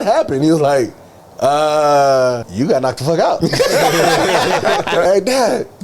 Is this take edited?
yes; 2 cuts; at 2.5 s, 5.1 s

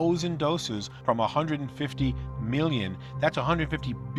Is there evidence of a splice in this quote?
no; 0 cuts

